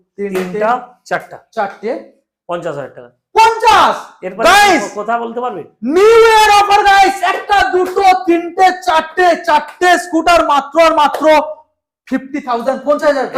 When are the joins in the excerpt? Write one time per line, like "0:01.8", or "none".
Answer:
none